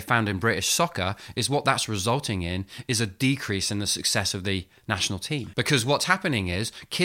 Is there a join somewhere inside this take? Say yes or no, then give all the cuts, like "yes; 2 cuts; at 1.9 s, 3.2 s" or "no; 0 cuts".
yes; 1 cut; at 5.4 s